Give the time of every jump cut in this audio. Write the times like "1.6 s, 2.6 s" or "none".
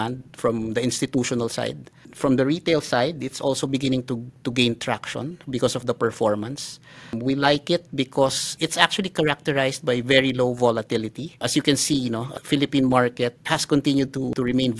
none